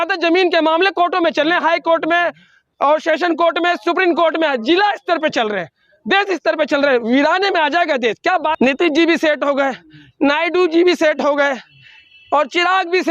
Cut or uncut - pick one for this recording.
cut